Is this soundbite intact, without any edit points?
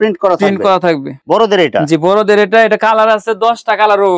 no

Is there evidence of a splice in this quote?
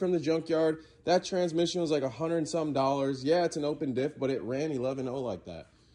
no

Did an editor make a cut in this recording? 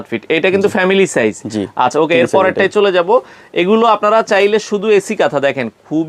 no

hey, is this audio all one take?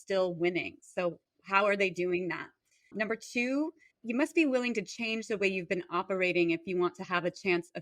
no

